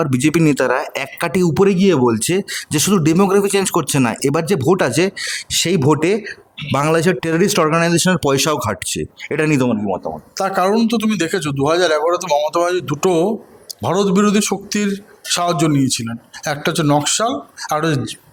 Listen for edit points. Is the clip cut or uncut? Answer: uncut